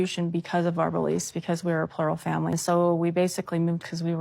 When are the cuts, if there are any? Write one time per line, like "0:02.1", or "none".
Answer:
0:02.6